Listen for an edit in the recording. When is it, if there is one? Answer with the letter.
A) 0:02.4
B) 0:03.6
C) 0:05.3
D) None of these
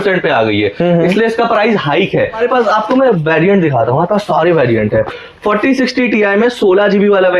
A